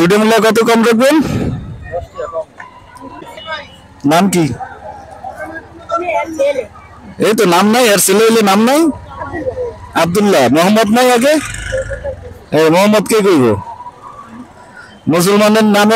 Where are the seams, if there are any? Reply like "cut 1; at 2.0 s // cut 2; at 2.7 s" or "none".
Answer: cut 1; at 3.4 s